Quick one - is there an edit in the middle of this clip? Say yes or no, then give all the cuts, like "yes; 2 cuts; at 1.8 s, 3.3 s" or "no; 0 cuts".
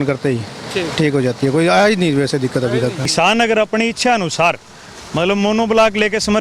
yes; 1 cut; at 3.0 s